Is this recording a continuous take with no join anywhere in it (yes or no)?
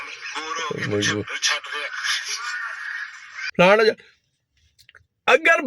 no